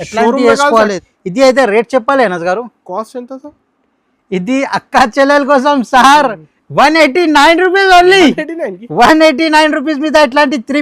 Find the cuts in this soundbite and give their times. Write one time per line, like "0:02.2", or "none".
0:01.0